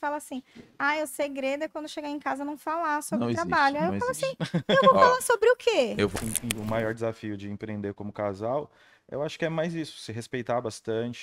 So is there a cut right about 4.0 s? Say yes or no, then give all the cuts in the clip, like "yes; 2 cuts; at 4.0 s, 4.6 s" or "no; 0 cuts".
no; 1 cut; at 6.1 s